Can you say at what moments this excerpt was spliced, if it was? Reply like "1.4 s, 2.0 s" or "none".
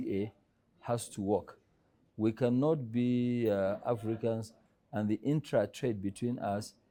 none